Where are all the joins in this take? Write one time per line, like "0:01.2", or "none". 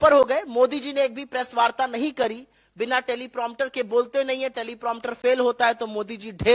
none